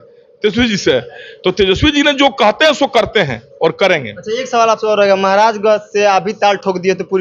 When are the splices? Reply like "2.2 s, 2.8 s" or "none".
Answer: none